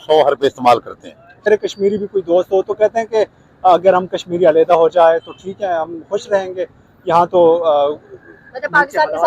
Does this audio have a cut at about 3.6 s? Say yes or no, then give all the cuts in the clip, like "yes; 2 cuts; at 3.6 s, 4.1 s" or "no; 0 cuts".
no; 1 cut; at 1.4 s